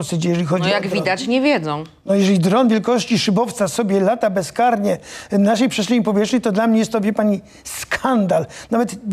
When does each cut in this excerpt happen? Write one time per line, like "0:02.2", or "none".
none